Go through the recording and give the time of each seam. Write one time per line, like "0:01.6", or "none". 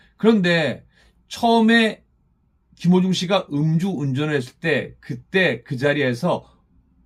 none